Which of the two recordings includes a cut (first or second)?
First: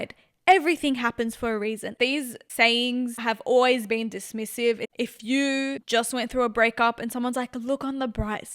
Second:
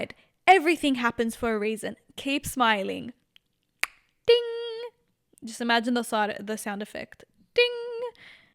first